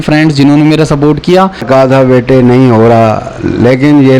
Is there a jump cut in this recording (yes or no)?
yes